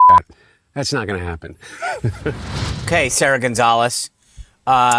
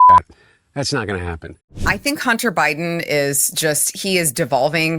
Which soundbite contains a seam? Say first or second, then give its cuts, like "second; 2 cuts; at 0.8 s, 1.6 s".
second; 1 cut; at 1.8 s